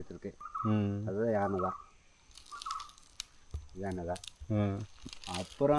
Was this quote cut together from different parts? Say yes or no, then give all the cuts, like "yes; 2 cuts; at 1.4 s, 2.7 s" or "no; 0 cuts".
no; 0 cuts